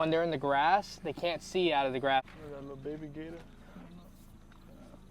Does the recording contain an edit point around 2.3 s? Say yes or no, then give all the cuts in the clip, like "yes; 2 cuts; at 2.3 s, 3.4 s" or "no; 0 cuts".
yes; 1 cut; at 2.3 s